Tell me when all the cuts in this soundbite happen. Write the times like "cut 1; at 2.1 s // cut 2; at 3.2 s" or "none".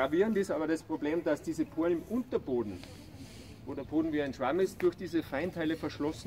none

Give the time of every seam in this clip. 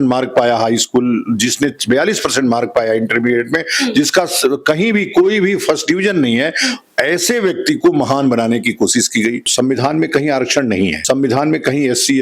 cut 1; at 9.4 s // cut 2; at 11.0 s

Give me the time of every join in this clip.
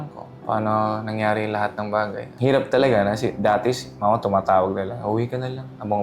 cut 1; at 2.3 s

